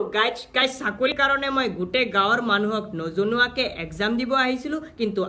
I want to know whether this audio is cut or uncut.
cut